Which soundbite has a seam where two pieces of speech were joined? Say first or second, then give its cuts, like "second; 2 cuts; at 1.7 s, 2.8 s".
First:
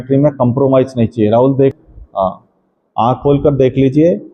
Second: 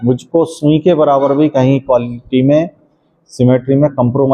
first; 1 cut; at 1.7 s